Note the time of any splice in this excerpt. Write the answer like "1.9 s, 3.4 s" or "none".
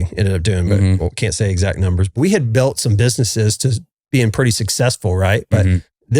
2.2 s